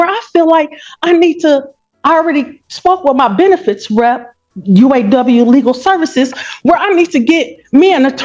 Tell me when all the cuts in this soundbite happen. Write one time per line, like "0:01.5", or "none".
0:01.1

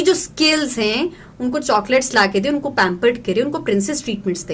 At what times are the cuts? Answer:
none

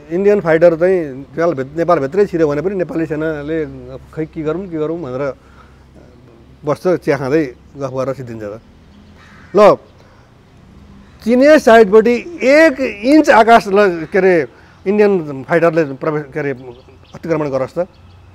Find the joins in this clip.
none

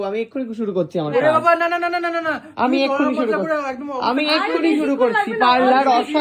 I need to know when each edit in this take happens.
none

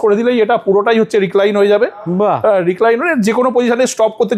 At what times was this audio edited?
none

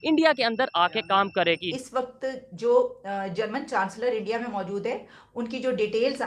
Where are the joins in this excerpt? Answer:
0:01.8

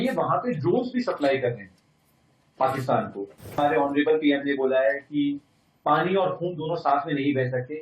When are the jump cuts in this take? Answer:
0:03.6

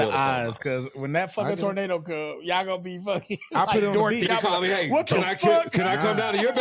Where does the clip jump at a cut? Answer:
0:04.3

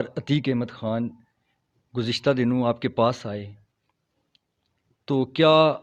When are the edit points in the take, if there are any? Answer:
none

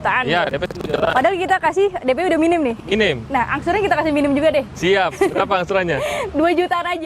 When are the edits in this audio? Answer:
none

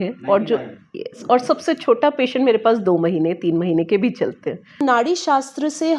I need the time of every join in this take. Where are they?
0:04.8

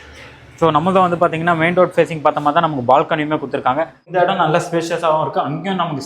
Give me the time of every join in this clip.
0:04.0

